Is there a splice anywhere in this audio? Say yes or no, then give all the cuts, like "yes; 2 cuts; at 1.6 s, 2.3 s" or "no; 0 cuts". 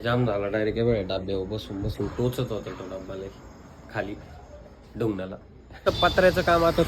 no; 0 cuts